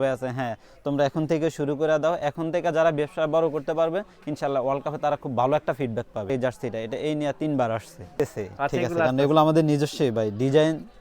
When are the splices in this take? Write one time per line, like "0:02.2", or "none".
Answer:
0:06.3
0:08.1